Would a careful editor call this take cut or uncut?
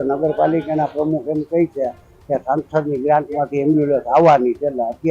uncut